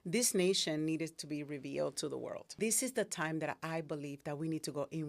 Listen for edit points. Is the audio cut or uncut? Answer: cut